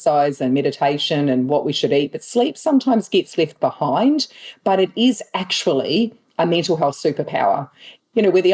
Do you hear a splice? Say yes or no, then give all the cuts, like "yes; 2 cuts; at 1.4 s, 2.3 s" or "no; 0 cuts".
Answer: no; 0 cuts